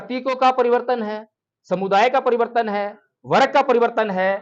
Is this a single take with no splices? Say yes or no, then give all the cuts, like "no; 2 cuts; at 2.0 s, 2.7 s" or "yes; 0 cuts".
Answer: yes; 0 cuts